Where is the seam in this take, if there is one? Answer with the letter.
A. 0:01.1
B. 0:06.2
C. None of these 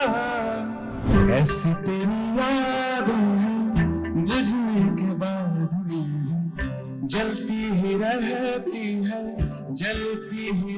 A